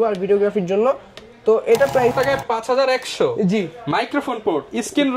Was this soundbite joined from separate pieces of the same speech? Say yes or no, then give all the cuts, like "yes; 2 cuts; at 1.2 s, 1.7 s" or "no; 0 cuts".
yes; 1 cut; at 2.1 s